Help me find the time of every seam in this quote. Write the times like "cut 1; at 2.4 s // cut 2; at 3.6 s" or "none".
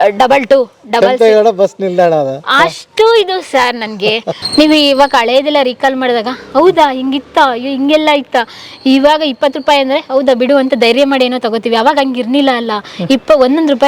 cut 1; at 4.4 s